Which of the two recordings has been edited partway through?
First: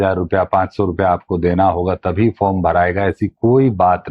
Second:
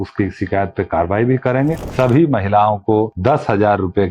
second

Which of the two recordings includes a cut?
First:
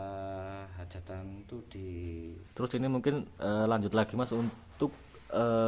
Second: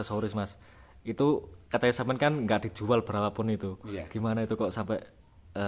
first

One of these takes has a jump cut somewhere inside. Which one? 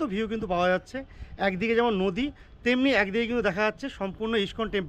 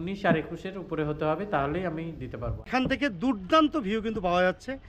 second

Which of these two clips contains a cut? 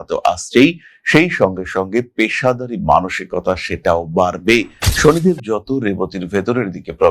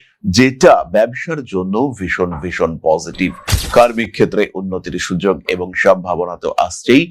first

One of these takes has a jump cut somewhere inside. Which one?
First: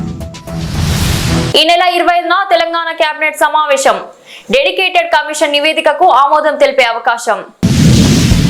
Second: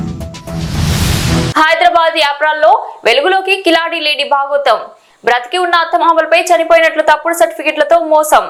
first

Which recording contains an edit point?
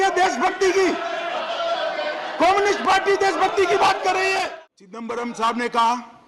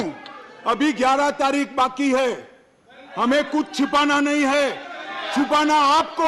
first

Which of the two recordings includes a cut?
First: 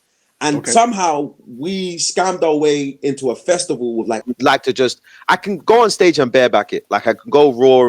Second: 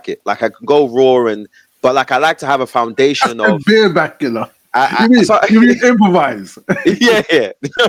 first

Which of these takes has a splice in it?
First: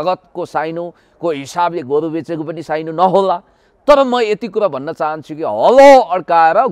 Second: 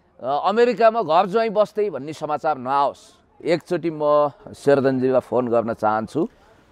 second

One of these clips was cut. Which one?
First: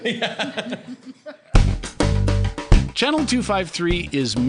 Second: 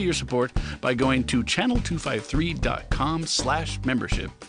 first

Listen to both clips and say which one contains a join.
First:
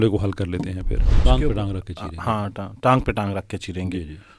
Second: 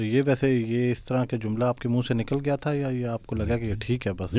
first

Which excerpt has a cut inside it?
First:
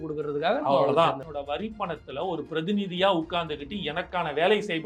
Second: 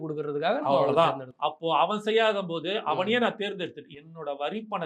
first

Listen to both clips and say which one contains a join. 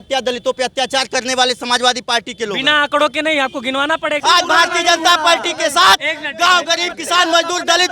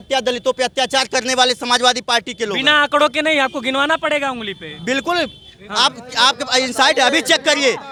first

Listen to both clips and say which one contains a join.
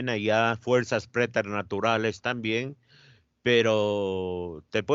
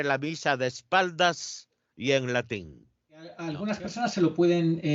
second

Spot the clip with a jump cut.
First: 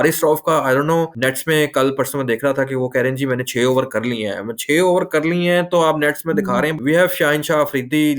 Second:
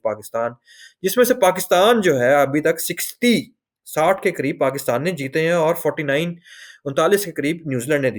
first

